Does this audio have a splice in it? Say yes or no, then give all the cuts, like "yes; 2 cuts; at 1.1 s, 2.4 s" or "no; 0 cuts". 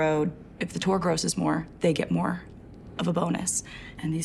no; 0 cuts